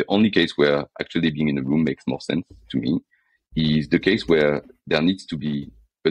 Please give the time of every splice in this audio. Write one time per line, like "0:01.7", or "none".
none